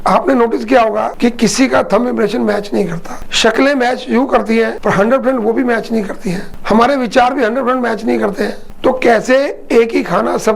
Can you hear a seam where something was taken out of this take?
yes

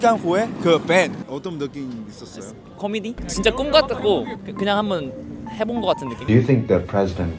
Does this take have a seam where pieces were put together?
yes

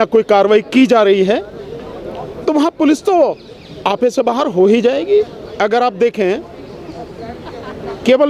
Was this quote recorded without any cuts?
yes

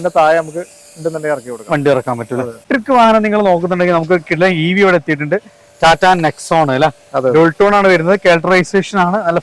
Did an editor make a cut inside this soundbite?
yes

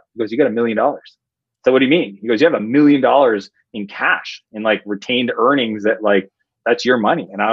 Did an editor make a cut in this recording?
no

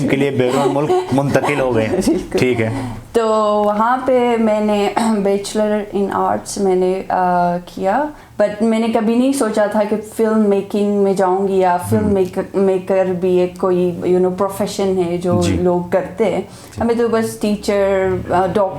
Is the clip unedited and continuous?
no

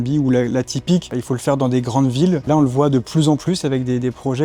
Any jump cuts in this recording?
yes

